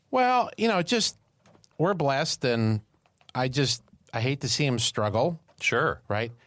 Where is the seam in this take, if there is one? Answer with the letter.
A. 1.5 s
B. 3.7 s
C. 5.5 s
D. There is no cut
C